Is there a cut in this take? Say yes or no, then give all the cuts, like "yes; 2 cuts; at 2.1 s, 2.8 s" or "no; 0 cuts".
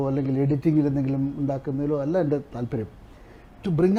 no; 0 cuts